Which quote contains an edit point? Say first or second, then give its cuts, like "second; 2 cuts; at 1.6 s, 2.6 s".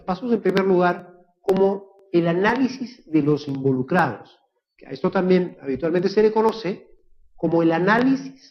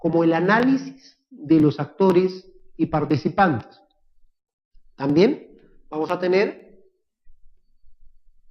second; 1 cut; at 6.0 s